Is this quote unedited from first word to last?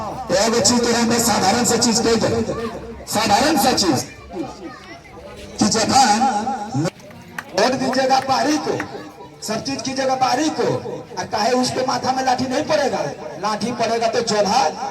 no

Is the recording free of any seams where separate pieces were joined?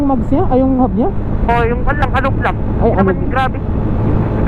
yes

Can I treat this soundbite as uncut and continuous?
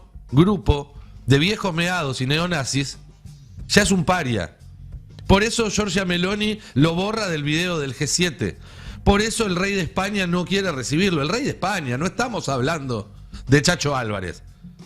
yes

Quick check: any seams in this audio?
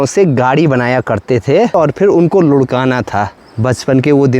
yes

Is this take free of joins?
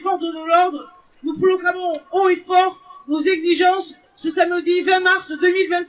yes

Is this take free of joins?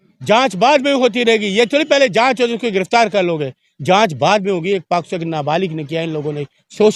yes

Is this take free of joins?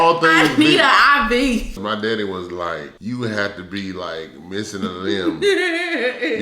no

